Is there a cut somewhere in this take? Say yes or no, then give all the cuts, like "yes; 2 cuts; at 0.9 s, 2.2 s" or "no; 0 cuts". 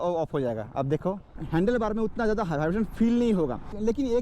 yes; 1 cut; at 1.3 s